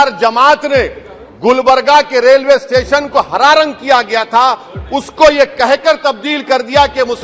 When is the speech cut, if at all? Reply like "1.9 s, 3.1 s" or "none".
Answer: none